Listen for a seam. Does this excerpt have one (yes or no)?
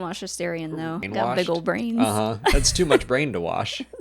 yes